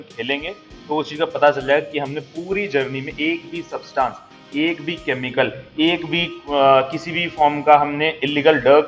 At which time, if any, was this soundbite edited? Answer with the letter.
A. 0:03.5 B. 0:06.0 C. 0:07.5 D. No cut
D